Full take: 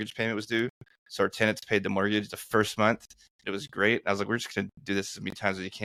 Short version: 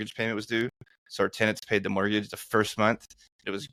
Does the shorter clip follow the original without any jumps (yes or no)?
yes